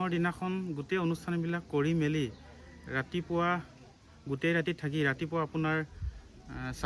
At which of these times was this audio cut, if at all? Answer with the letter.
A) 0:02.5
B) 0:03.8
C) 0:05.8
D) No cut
D